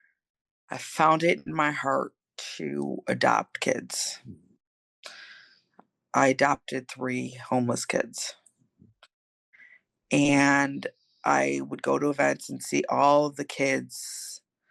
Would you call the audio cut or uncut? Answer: uncut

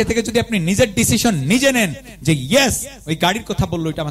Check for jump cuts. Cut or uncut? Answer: uncut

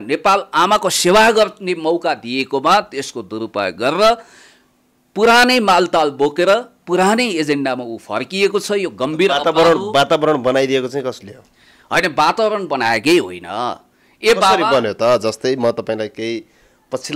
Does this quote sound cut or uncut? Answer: uncut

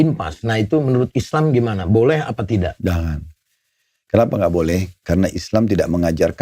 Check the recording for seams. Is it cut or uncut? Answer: uncut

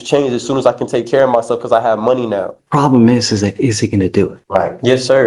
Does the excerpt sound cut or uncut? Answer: cut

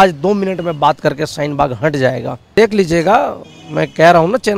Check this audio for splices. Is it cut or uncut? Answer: cut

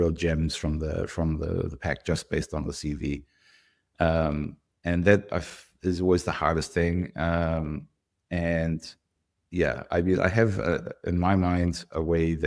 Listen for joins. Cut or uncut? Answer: uncut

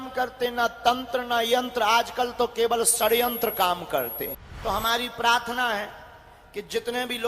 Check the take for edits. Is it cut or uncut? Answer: cut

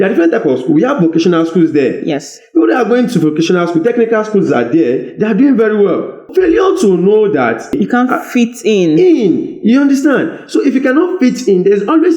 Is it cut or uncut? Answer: cut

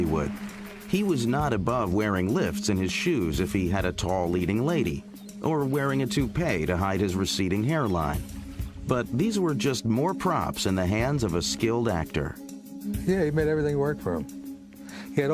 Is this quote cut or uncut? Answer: uncut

